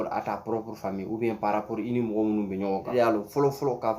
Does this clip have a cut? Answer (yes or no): yes